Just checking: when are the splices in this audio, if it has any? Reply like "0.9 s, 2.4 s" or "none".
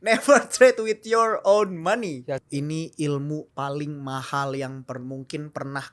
2.4 s